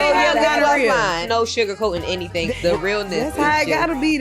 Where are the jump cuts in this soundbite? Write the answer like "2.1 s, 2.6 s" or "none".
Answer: 1.2 s, 2.5 s